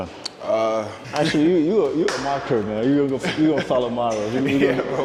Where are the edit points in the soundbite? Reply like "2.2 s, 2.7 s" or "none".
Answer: none